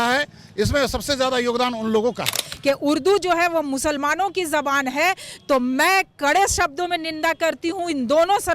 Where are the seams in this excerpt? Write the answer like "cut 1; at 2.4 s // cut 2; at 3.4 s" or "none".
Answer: cut 1; at 2.4 s

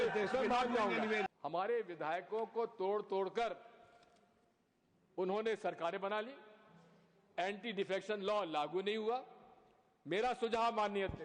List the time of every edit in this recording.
cut 1; at 1.3 s

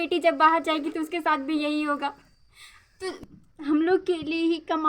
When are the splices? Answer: cut 1; at 3.2 s

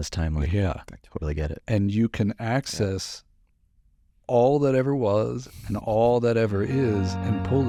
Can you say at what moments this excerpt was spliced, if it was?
none

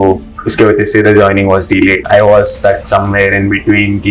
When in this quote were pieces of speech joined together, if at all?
cut 1; at 2.0 s

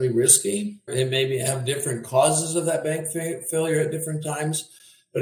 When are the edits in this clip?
none

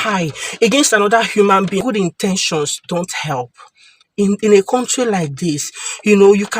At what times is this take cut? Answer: cut 1; at 1.8 s

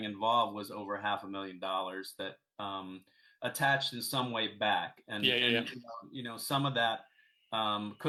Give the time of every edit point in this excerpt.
none

